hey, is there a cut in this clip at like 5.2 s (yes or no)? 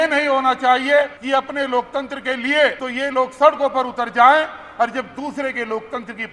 no